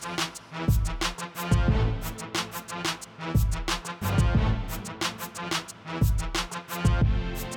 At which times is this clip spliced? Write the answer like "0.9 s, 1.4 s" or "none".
none